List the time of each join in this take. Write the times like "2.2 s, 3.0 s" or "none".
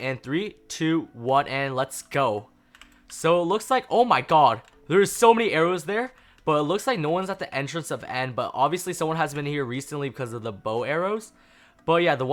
none